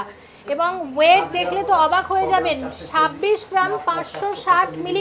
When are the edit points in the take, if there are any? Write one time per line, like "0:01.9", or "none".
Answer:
none